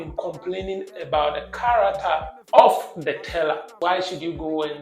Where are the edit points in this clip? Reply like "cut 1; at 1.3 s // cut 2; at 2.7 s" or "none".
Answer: cut 1; at 2.4 s // cut 2; at 3.8 s